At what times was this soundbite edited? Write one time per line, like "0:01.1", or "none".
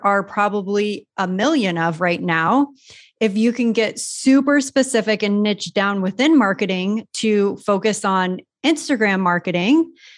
none